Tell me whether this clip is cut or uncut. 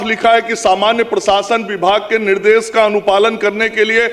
uncut